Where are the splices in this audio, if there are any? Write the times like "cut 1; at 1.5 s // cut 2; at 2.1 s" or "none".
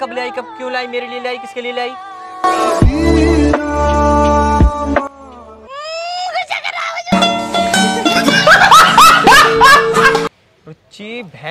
none